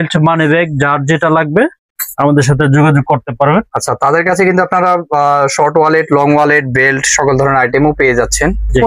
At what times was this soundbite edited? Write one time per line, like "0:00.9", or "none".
none